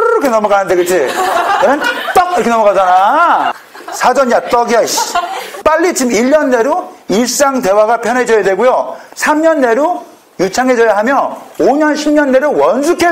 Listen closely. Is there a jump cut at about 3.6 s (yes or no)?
yes